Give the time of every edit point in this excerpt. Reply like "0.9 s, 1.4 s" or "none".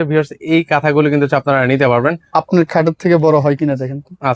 2.3 s